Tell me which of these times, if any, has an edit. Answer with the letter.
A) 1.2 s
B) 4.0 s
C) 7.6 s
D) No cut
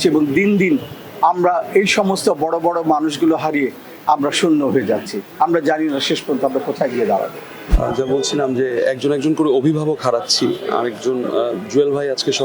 C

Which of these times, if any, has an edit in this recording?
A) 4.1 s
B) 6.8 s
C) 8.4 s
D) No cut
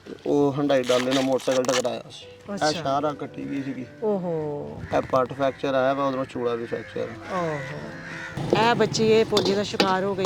C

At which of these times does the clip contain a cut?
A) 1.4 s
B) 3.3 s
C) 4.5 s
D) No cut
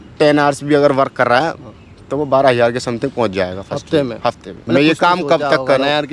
C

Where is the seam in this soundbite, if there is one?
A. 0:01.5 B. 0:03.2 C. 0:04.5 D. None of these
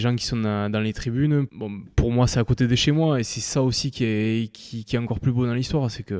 A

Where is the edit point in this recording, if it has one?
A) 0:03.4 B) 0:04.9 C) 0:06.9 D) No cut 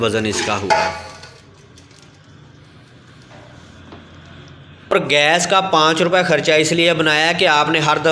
B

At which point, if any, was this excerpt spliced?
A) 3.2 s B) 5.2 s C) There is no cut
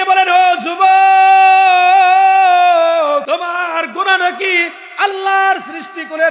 A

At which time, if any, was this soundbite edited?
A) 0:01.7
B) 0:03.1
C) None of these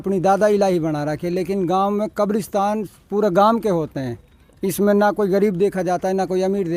C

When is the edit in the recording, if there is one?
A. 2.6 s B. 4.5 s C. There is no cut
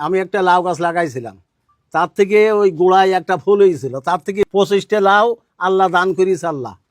B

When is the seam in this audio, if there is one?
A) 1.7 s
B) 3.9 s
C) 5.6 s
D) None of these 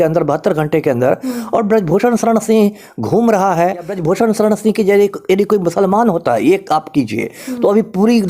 B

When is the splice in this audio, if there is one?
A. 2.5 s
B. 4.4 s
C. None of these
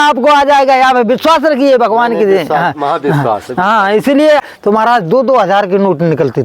B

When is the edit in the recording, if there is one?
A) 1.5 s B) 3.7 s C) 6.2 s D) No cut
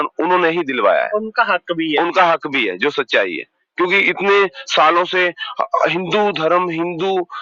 D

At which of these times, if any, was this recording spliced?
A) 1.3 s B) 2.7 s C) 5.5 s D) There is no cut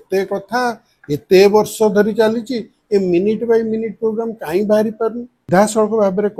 C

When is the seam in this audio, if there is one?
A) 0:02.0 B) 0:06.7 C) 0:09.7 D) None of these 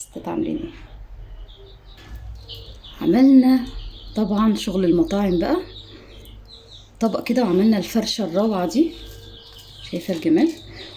A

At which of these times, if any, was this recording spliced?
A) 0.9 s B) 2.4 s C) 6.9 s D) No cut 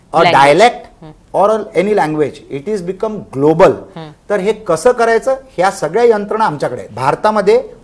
C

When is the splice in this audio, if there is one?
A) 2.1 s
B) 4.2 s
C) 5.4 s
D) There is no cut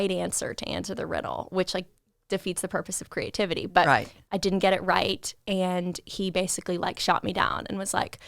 B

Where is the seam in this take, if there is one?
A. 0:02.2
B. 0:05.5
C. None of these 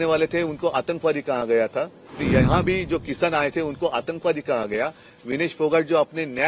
A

